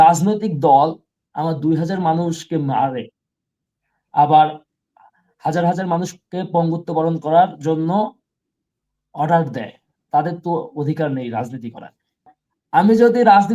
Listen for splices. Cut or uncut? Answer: cut